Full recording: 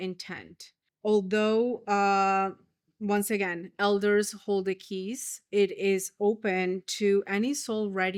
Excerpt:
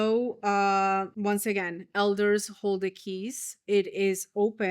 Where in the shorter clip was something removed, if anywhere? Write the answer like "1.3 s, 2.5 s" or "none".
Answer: 1.1 s